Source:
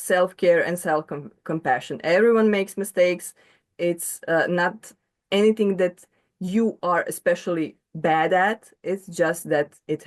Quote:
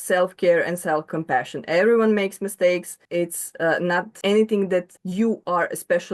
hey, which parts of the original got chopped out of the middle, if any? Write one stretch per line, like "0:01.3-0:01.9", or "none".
0:01.1-0:01.5
0:03.3-0:03.6
0:04.8-0:05.2
0:06.1-0:06.3